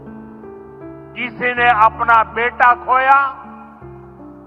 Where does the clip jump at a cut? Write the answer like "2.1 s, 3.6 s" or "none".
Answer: 1.0 s, 3.5 s